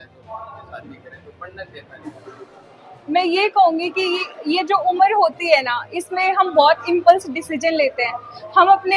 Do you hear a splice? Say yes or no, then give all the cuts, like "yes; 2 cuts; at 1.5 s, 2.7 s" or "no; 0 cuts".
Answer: no; 0 cuts